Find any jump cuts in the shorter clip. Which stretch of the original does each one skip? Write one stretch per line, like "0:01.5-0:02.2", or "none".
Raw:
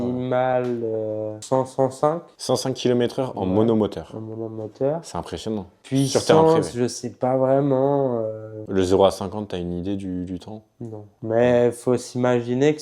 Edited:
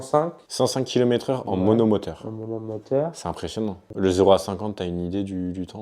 0:05.7-0:08.5